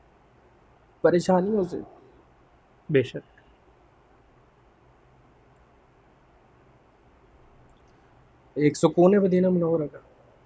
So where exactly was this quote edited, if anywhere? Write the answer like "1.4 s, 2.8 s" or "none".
none